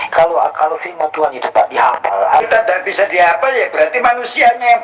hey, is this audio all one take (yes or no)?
no